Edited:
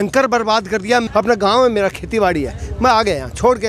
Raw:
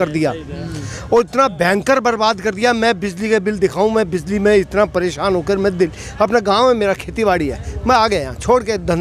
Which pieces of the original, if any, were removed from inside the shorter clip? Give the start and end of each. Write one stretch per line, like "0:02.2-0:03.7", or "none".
0:02.8-0:06.1